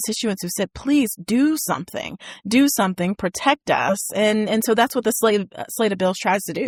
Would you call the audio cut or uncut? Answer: uncut